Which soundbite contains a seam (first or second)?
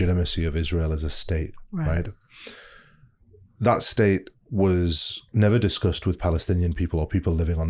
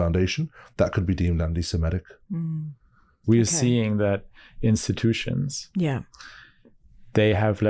second